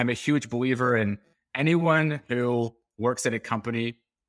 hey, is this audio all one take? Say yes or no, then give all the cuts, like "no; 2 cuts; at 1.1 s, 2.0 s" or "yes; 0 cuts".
yes; 0 cuts